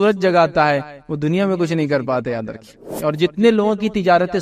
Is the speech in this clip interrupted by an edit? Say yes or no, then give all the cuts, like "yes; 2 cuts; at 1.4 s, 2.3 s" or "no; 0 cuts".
yes; 1 cut; at 2.8 s